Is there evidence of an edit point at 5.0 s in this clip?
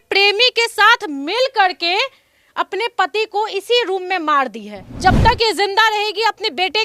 yes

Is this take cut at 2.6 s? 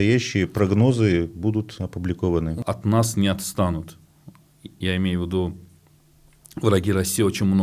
yes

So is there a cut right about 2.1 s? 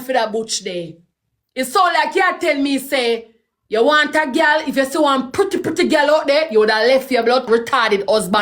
no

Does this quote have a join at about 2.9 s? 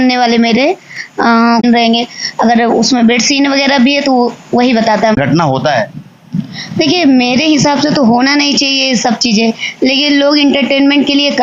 no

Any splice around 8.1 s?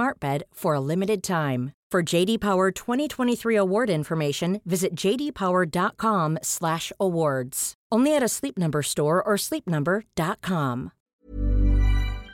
no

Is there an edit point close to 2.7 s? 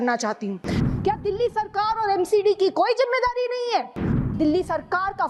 no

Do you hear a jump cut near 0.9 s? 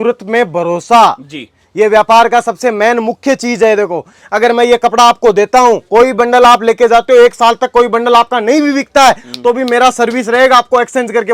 no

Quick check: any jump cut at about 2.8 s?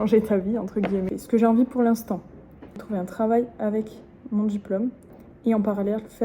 yes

